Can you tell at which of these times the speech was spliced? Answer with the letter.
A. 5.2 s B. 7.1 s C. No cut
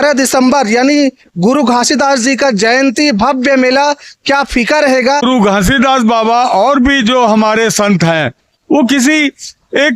A